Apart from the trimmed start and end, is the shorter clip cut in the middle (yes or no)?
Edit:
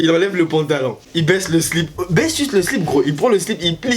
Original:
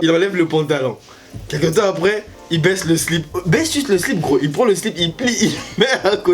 yes